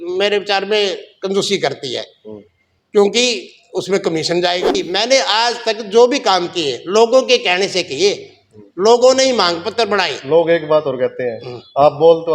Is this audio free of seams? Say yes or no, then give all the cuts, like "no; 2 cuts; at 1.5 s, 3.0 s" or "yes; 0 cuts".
no; 1 cut; at 4.7 s